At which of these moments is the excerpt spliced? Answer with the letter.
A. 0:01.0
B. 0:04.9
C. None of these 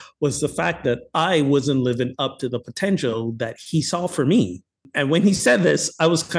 B